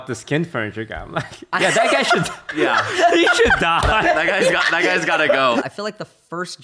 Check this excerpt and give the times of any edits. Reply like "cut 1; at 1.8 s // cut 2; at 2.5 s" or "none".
cut 1; at 5.6 s